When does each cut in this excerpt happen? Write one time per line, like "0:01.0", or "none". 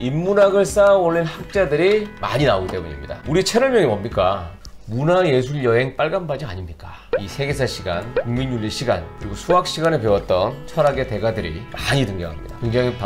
none